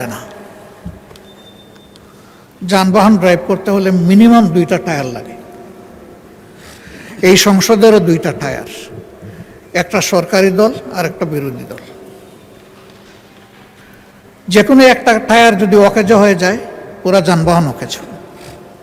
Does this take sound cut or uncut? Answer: uncut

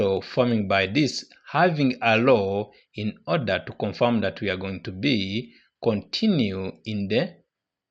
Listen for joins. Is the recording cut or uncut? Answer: uncut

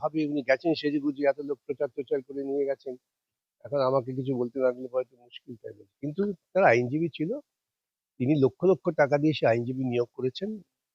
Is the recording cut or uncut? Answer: uncut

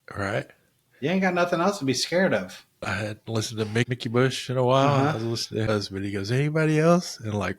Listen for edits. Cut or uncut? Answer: cut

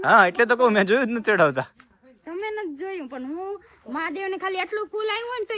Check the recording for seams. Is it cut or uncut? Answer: uncut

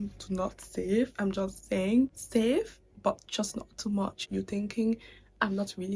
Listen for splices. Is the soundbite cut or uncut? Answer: cut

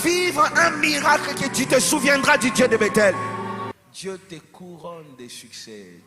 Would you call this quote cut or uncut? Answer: cut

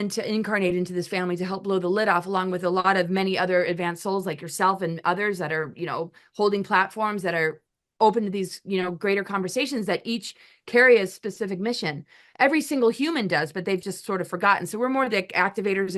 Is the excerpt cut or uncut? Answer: uncut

